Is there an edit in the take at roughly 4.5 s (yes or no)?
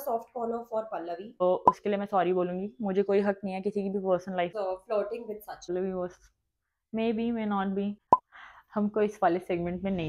yes